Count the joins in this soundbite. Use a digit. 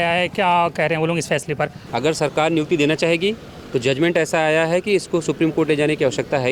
1